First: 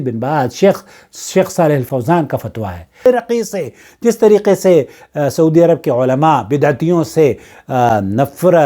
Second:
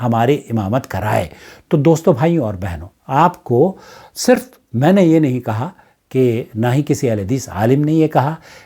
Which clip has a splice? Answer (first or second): first